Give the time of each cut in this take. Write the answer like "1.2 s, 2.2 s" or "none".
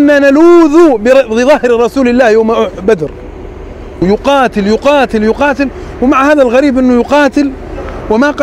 4.0 s